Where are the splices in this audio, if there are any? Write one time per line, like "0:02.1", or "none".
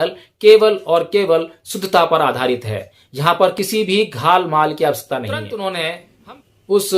0:05.4